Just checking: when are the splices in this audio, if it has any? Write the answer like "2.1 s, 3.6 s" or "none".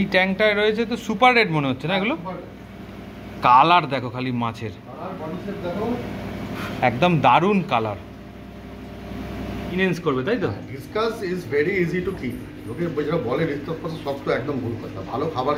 9.8 s